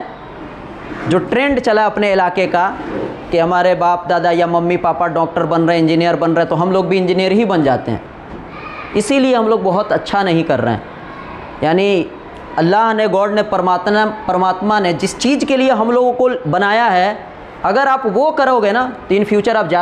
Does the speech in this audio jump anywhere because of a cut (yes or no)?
no